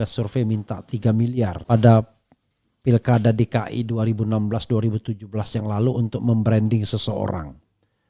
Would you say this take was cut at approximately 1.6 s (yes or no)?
yes